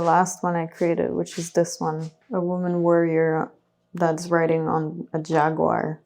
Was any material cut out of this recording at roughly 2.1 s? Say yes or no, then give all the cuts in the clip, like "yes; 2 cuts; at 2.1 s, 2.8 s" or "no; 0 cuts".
yes; 1 cut; at 2.1 s